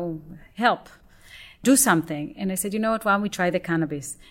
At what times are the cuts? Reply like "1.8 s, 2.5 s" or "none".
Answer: 1.6 s